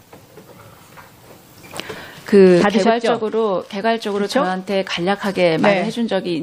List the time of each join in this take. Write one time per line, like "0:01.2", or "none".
0:02.8

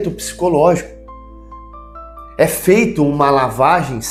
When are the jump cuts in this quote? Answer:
none

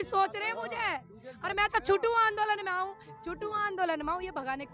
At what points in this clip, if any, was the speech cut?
none

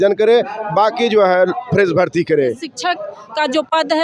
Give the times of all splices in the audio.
0:02.6

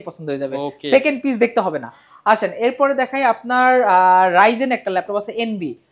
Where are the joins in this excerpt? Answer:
none

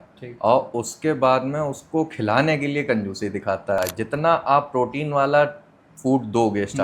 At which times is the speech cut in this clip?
0:03.8

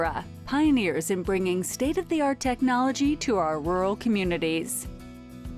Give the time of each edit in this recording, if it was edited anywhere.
0:04.7

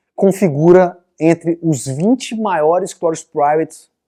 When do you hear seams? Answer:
none

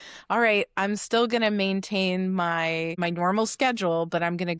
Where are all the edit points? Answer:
0:02.9

